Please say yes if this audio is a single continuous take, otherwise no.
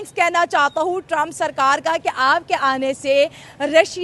yes